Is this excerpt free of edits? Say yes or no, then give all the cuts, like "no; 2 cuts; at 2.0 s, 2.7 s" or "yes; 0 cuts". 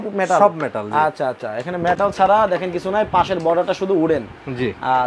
yes; 0 cuts